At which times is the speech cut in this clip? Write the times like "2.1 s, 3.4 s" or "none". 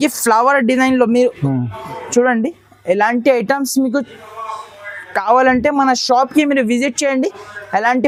none